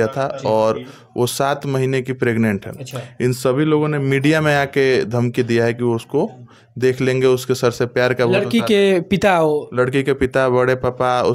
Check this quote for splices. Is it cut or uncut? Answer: uncut